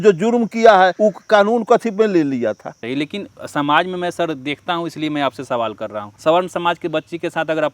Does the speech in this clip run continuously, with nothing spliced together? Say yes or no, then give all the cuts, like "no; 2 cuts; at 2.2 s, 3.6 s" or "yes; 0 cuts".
no; 3 cuts; at 0.9 s, 2.8 s, 6.1 s